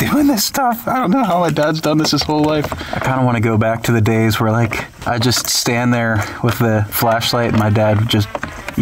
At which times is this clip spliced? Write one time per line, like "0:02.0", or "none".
0:02.8
0:04.9
0:06.9